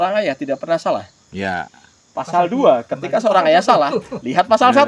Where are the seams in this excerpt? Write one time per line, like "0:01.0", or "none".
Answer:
none